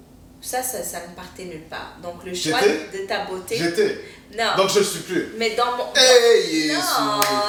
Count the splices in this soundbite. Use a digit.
0